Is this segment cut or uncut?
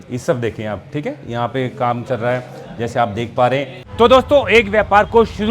cut